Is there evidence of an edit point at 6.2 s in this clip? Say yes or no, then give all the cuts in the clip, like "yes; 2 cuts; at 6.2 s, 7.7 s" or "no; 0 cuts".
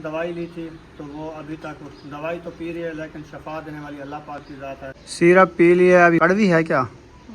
yes; 2 cuts; at 5.0 s, 6.2 s